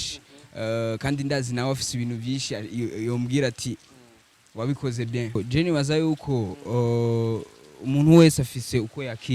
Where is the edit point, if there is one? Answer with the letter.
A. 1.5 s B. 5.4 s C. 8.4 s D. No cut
B